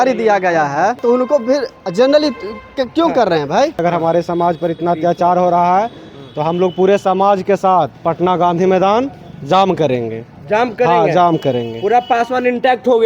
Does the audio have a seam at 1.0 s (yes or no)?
yes